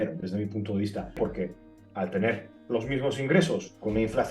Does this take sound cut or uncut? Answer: cut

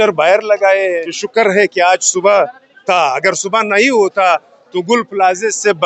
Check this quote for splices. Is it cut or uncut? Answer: cut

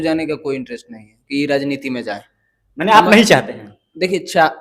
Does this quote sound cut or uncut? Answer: uncut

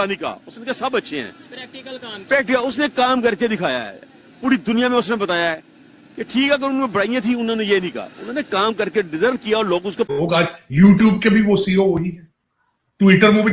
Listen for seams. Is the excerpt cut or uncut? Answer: cut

